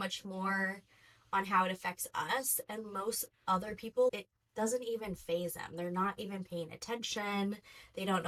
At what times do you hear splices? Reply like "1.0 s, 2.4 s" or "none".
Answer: none